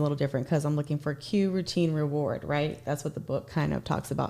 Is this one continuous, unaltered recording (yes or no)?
yes